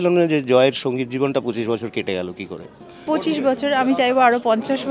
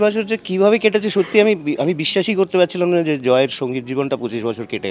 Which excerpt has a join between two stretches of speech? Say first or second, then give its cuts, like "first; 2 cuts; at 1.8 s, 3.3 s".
first; 1 cut; at 3.1 s